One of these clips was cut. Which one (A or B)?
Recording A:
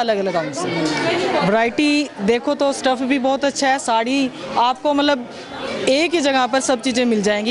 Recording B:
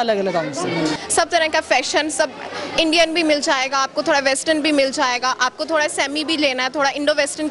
B